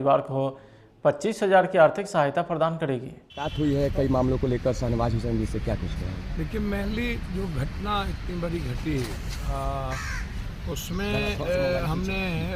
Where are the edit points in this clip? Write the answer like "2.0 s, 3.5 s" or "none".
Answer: none